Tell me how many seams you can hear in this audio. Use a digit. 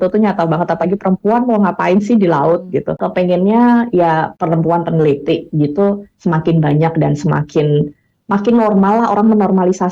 2